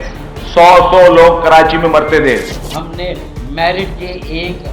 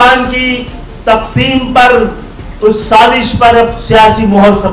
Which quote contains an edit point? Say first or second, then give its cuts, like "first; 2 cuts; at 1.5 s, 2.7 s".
first; 1 cut; at 2.6 s